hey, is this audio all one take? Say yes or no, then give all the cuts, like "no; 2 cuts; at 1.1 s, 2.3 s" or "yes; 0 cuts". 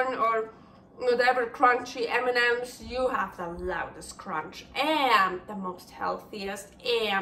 yes; 0 cuts